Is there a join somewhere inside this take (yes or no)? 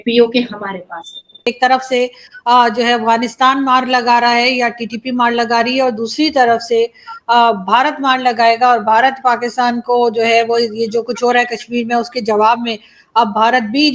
yes